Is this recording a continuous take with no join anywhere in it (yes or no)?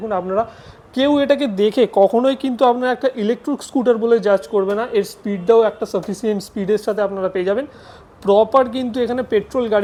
yes